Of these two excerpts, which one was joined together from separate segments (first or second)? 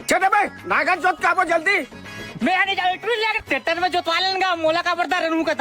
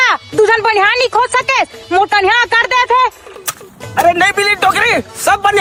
first